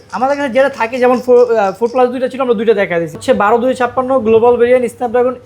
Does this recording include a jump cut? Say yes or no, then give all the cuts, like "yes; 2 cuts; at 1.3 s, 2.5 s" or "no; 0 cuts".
yes; 1 cut; at 3.2 s